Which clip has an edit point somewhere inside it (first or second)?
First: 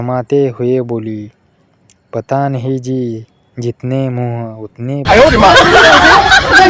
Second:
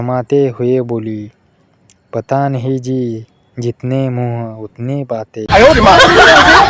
second